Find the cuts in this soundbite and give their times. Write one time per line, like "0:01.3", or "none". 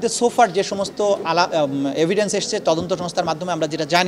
none